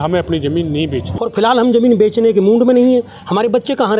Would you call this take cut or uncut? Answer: cut